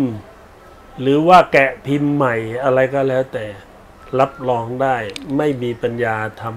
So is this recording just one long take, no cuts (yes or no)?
yes